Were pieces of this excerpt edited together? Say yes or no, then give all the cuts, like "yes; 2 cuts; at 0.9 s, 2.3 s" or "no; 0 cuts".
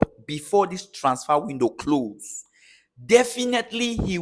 no; 0 cuts